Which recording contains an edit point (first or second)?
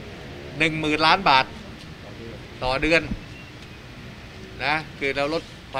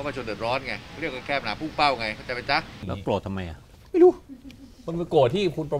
second